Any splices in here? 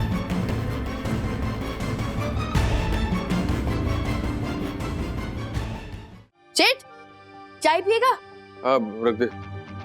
yes; 1 cut; at 6.0 s

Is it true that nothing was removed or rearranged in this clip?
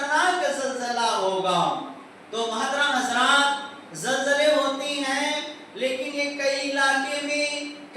yes; 0 cuts

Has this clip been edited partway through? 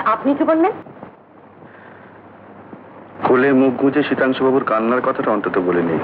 no; 0 cuts

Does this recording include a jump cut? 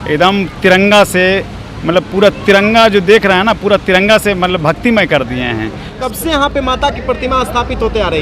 yes; 1 cut; at 6.0 s

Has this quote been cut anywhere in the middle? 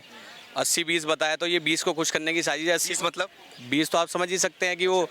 no; 0 cuts

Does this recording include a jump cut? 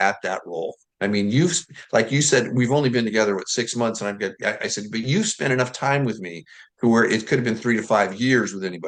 no; 0 cuts

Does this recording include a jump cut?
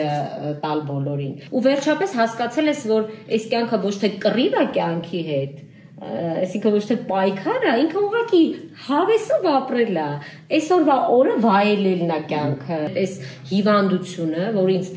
yes; 2 cuts; at 1.4 s, 12.9 s

